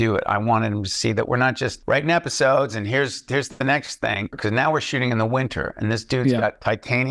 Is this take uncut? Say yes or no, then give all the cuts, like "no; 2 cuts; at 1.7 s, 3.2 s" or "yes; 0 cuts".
no; 2 cuts; at 1.8 s, 4.3 s